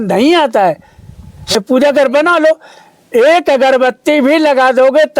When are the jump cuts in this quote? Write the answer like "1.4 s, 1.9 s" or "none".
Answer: 1.6 s